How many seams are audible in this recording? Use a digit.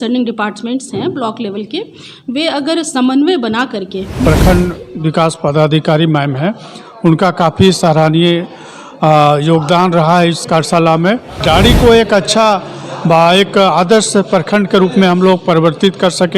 2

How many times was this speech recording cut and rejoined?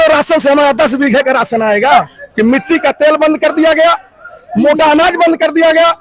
1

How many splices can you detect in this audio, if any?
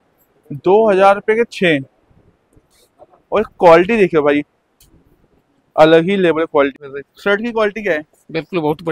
1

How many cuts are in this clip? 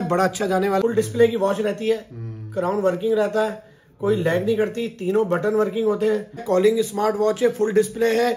2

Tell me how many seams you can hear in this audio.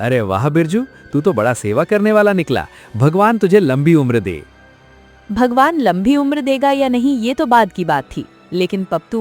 0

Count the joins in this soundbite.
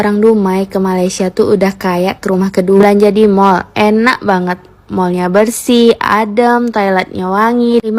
1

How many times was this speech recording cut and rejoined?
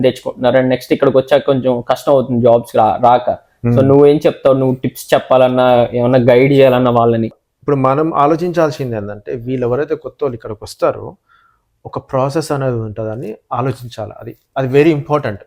0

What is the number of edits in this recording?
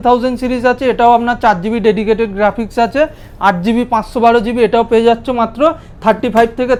0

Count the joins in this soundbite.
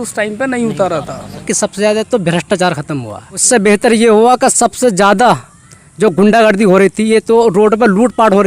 2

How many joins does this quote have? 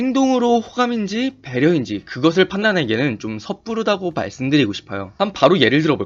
1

